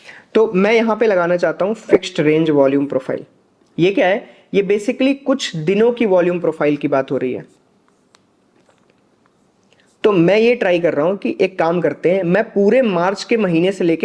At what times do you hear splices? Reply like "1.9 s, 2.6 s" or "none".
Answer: none